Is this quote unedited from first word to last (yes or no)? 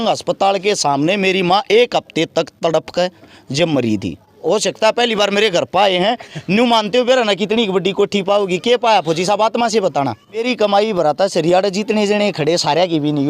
no